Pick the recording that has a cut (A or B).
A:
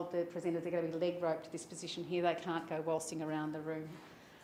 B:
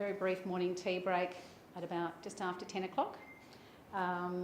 B